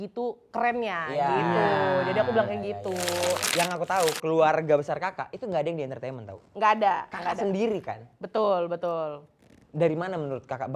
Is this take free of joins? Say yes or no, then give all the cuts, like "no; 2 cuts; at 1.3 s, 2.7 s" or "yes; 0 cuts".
no; 1 cut; at 3.5 s